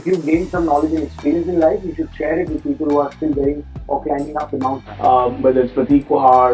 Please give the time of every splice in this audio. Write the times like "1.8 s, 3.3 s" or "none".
4.8 s